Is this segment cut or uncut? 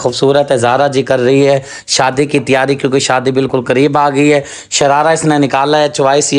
uncut